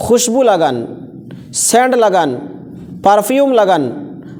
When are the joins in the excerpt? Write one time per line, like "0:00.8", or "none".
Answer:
none

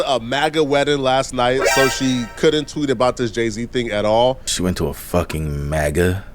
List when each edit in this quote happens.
0:04.5

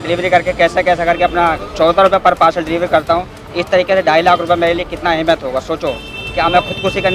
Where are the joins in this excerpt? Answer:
none

